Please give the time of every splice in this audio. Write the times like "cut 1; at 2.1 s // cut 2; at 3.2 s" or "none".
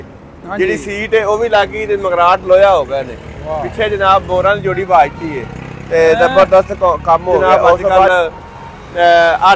cut 1; at 8.1 s